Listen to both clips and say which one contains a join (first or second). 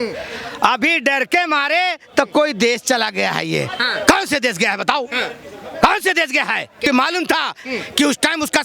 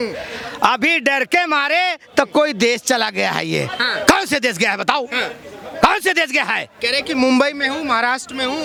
first